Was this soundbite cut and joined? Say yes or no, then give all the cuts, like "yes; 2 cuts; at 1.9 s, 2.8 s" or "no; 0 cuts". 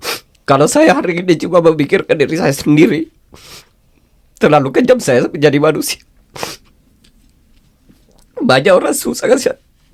no; 0 cuts